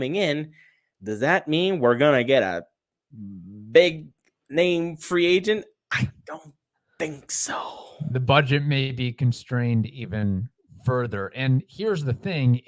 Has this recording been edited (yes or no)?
no